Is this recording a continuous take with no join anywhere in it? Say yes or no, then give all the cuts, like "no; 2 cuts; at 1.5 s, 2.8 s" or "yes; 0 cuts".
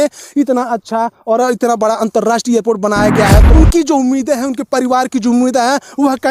no; 1 cut; at 3.5 s